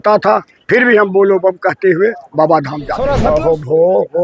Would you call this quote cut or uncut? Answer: cut